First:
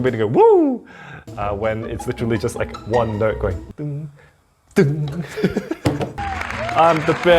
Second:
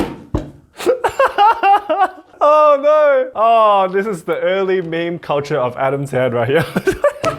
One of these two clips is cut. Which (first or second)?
first